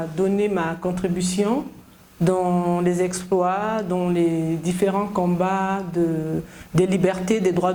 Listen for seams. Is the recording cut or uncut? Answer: uncut